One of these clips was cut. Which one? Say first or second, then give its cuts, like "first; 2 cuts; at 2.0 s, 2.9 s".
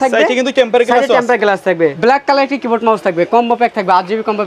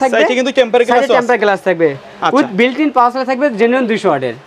first; 1 cut; at 2.0 s